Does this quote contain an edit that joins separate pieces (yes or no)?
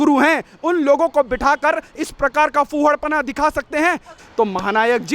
yes